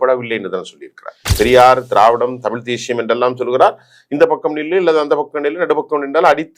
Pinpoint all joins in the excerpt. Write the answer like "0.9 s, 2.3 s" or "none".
1.3 s